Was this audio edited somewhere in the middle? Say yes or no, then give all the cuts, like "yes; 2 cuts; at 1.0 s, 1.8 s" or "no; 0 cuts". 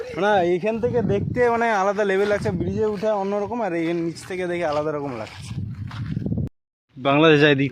yes; 1 cut; at 6.5 s